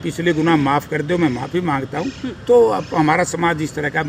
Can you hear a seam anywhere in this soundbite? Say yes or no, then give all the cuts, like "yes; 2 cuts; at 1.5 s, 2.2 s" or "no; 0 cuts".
no; 0 cuts